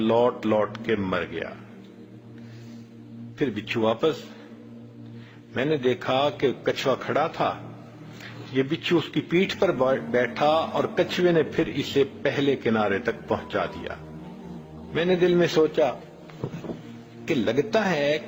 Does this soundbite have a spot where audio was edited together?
no; 0 cuts

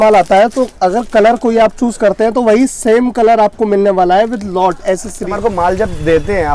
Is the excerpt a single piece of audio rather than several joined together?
no; 1 cut; at 5.3 s

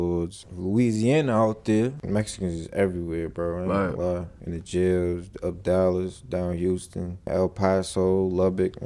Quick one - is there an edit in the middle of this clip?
yes; 1 cut; at 2.0 s

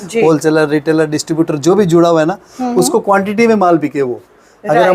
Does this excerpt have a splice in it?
no; 0 cuts

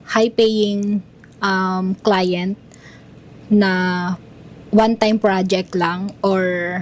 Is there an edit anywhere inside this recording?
no; 0 cuts

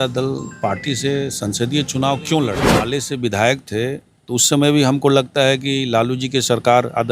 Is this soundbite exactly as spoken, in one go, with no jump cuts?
no; 1 cut; at 2.8 s

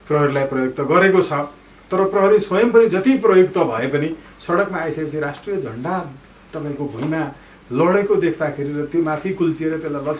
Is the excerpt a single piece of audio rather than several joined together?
yes; 0 cuts

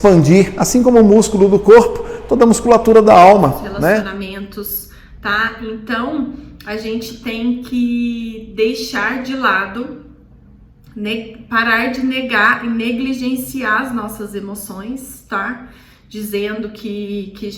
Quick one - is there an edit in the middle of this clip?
yes; 1 cut; at 4.1 s

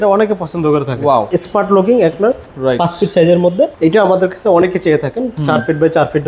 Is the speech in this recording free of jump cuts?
no; 2 cuts; at 1.3 s, 3.7 s

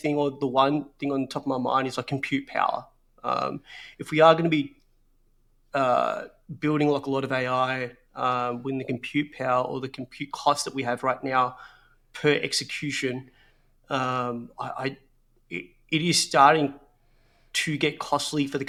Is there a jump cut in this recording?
no; 0 cuts

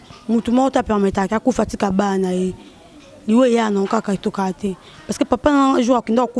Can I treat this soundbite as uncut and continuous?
yes; 0 cuts

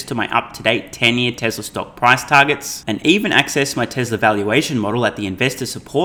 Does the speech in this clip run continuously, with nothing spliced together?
yes; 0 cuts

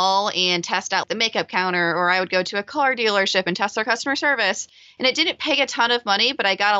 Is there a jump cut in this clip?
yes; 1 cut; at 1.0 s

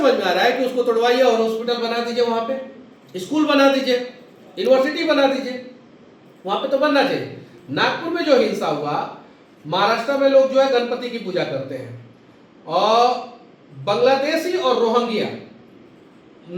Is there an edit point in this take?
no; 0 cuts

